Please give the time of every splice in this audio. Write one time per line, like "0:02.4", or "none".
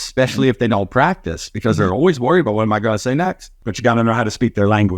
0:03.6